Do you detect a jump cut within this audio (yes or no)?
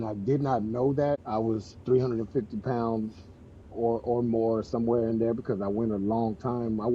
yes